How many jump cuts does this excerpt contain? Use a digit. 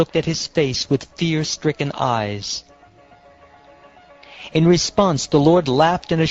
1